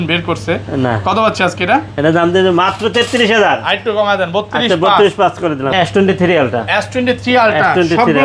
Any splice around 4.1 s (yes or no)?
no